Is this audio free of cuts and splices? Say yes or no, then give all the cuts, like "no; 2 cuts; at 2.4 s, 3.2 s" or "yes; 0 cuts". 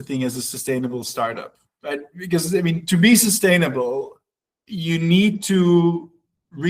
yes; 0 cuts